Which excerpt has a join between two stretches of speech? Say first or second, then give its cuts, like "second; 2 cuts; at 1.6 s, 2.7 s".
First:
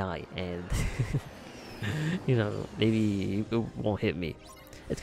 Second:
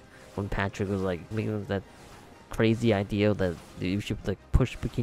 second; 1 cut; at 1.3 s